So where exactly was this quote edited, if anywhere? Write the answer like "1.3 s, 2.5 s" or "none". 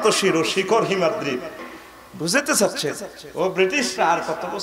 1.6 s